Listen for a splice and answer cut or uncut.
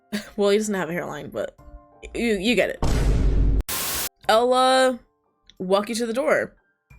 cut